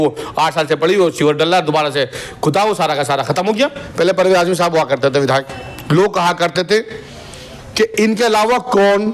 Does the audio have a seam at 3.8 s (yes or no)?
yes